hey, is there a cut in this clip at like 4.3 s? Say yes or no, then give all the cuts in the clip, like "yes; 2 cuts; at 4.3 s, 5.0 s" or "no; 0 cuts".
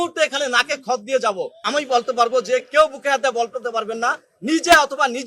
no; 1 cut; at 1.6 s